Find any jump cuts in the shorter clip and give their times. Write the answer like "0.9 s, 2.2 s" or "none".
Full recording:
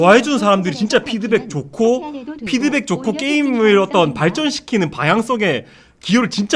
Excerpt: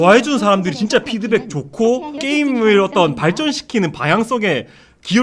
2.2 s

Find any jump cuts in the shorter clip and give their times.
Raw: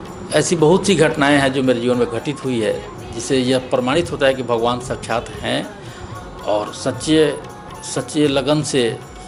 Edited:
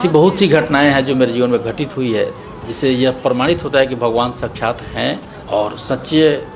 5.3 s

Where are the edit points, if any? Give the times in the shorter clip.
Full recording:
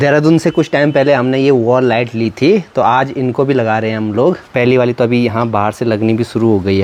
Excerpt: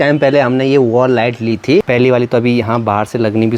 1.8 s

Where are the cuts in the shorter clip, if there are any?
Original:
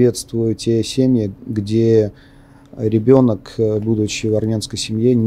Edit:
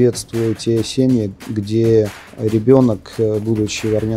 2.2 s

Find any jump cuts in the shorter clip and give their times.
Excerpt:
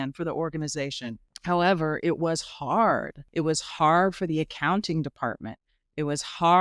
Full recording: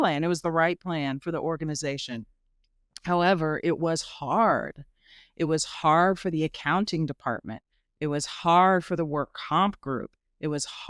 1.3 s, 3.2 s

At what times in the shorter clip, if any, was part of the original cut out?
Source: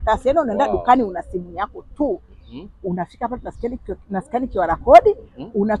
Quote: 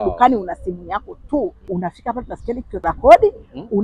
1.6 s, 2.8 s

